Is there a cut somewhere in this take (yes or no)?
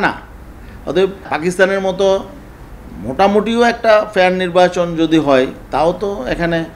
yes